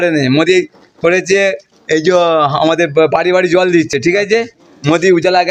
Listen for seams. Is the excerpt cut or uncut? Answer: uncut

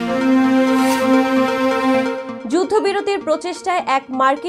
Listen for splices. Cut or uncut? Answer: cut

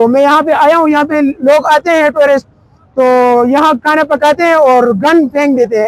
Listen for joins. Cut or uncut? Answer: uncut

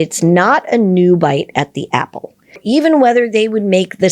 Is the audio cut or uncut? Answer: cut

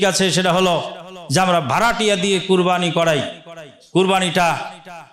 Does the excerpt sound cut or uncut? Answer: uncut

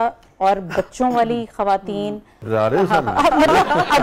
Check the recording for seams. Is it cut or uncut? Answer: cut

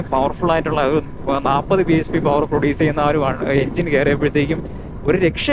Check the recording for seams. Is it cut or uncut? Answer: uncut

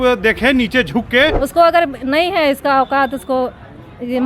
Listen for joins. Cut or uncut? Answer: cut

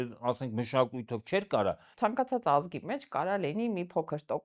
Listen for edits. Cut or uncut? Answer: cut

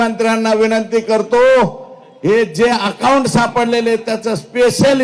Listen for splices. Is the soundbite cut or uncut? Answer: uncut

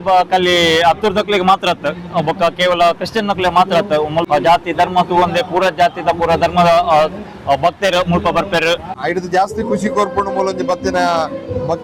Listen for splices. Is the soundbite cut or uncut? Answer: cut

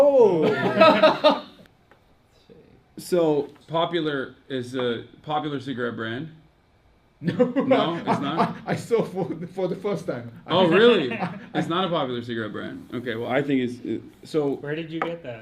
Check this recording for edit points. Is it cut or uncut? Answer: cut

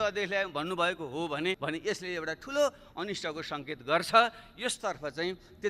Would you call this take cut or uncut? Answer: cut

